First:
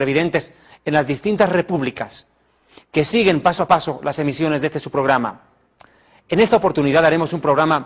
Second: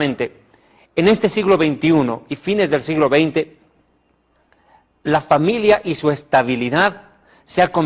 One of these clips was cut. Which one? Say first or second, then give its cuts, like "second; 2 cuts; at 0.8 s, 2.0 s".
second; 1 cut; at 3.4 s